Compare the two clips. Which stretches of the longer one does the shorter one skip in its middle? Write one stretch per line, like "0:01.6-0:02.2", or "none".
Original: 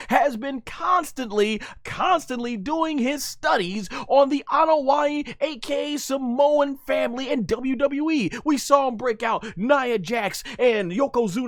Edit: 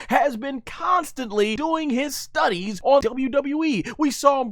0:01.6-0:02.6
0:04.1-0:07.4